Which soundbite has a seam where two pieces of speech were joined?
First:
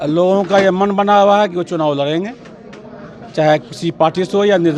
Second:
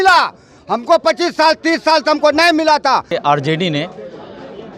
second; 1 cut; at 3.1 s

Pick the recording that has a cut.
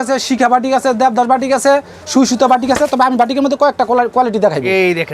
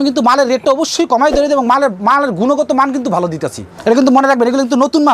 second; 1 cut; at 3.8 s

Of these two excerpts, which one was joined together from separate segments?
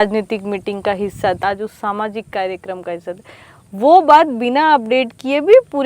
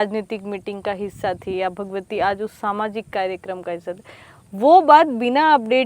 first; 1 cut; at 1.4 s

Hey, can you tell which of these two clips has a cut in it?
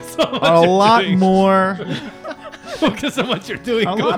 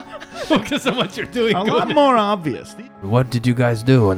second; 1 cut; at 3.0 s

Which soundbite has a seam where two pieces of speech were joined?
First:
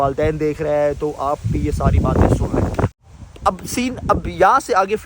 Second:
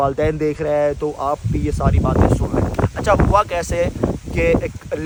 first; 1 cut; at 3.0 s

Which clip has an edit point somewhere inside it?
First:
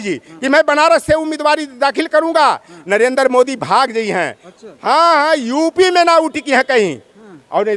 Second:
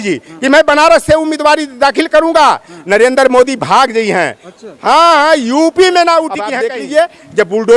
second; 1 cut; at 6.4 s

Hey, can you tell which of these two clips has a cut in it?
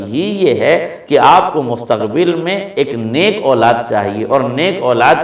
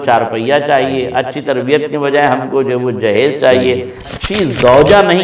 second; 1 cut; at 4.1 s

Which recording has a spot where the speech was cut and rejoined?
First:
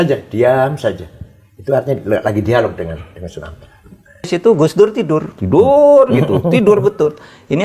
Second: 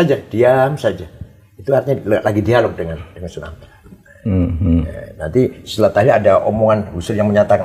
first; 1 cut; at 4.3 s

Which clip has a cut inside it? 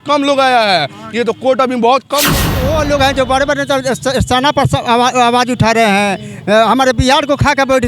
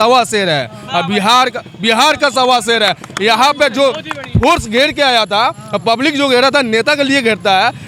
first; 1 cut; at 2.5 s

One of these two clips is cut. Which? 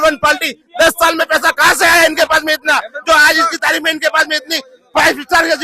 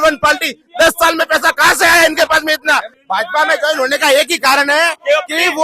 second; 1 cut; at 2.9 s

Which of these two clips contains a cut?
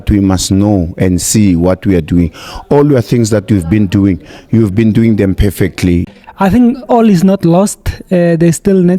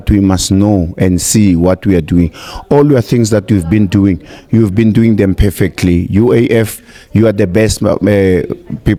first; 1 cut; at 6.1 s

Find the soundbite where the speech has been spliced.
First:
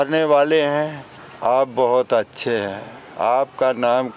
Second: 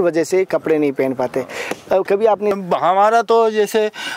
second; 1 cut; at 2.6 s

